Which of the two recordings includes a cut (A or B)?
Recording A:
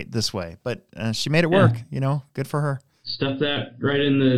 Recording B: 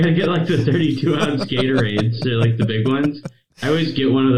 A